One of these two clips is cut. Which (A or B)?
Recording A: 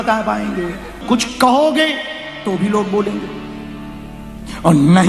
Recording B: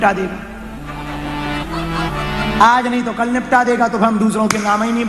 A